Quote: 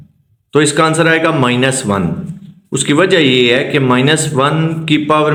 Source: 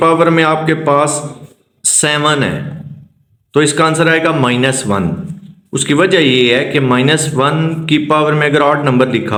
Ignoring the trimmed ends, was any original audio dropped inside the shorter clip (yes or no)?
no